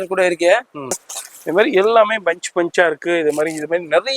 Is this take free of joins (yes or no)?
no